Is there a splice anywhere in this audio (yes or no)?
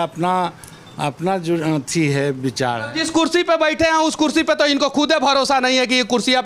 yes